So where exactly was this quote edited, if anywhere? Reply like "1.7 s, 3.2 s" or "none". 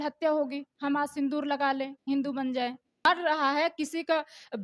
3.0 s